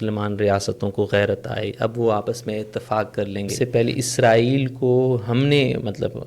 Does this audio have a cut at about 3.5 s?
yes; 1 cut; at 3.5 s

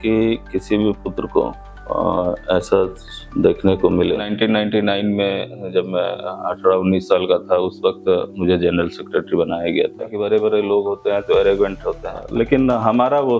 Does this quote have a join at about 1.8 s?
no; 3 cuts; at 4.3 s, 10.2 s, 12.2 s

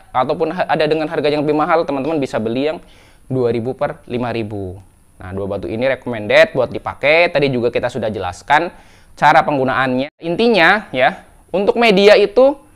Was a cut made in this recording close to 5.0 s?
no; 1 cut; at 10.2 s

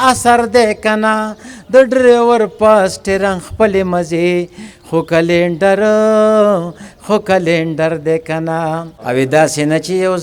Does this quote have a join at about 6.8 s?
no; 1 cut; at 8.9 s

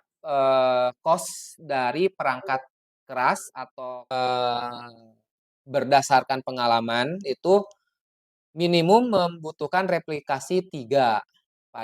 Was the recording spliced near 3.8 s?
yes; 1 cut; at 3.8 s

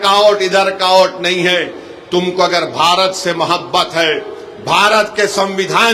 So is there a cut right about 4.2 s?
no; 0 cuts

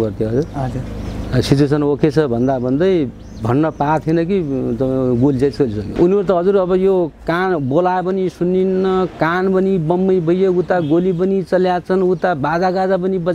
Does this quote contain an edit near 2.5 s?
no; 1 cut; at 5.8 s

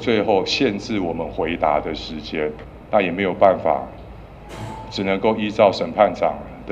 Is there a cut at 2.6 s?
yes; 1 cut; at 2.6 s

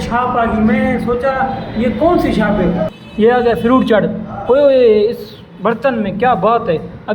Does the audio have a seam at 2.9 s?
yes; 1 cut; at 2.9 s

